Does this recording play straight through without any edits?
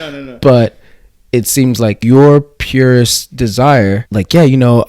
no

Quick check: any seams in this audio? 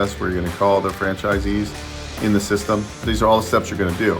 yes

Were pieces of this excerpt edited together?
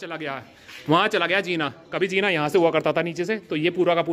no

